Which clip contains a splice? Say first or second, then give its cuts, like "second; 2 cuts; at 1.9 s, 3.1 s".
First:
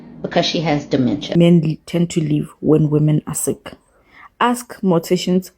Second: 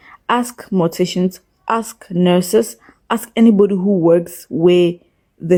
first; 1 cut; at 1.3 s